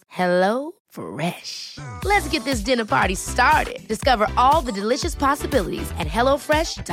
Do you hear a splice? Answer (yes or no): no